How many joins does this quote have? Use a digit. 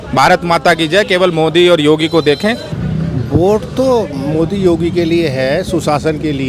1